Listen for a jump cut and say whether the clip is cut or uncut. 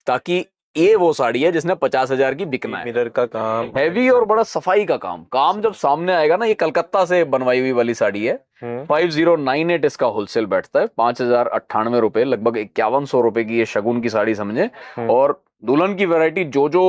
cut